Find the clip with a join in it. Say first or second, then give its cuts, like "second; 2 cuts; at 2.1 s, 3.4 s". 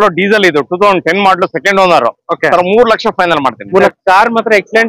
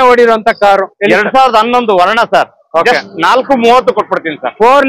first; 1 cut; at 3.9 s